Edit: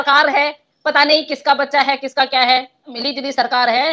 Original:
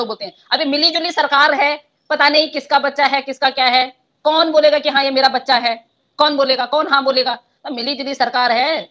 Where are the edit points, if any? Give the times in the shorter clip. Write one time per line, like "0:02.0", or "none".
0:02.8